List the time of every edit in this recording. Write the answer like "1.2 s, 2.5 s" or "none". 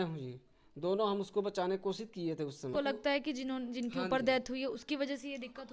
2.7 s

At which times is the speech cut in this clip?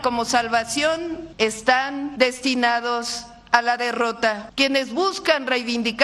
1.2 s, 2.1 s, 4.4 s

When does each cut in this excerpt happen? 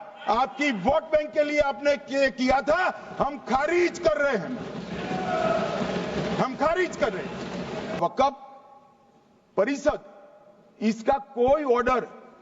7.9 s

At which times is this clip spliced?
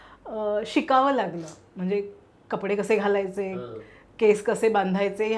none

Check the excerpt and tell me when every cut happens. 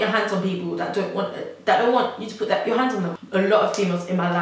3.1 s

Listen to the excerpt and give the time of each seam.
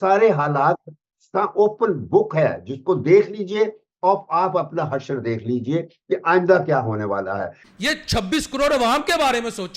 7.6 s

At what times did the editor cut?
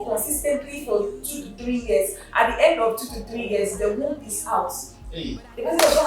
none

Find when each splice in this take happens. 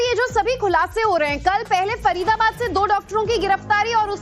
2.6 s

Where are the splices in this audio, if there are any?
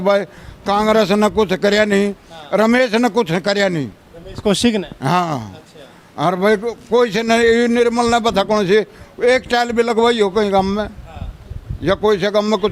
none

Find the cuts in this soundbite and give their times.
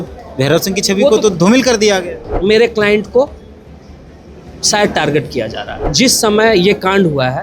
2.3 s, 5.8 s

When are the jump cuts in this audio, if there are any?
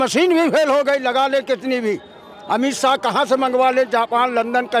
none

